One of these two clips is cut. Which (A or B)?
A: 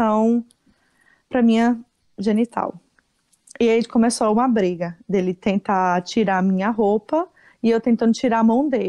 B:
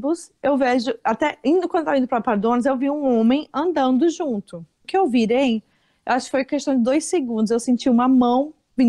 B